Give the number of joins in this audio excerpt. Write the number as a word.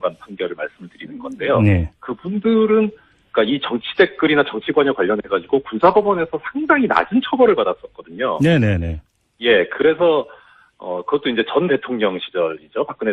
one